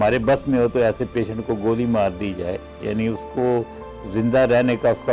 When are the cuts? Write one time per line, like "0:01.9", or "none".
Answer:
none